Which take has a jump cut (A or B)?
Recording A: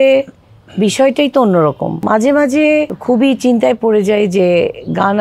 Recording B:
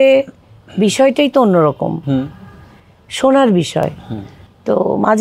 A